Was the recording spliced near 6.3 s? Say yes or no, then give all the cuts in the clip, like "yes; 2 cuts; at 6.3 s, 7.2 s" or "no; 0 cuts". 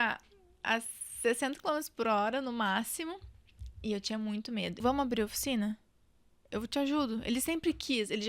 no; 1 cut; at 4.8 s